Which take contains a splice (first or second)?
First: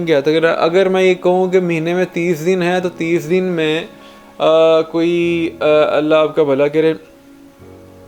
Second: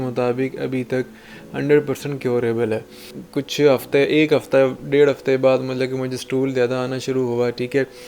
second